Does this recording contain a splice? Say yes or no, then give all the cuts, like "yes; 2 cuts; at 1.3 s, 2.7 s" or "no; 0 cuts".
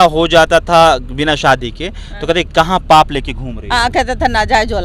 no; 0 cuts